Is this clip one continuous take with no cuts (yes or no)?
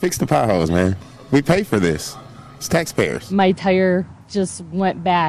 no